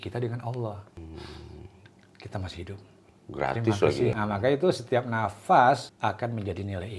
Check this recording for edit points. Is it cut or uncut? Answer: cut